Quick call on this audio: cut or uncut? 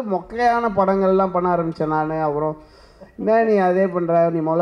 uncut